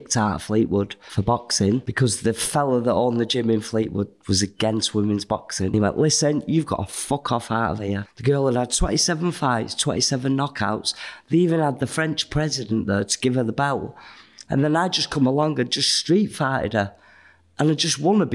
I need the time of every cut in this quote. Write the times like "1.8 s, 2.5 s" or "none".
1.0 s, 1.9 s, 5.7 s, 8.1 s